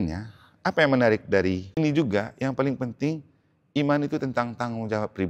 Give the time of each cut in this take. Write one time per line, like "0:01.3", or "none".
0:01.8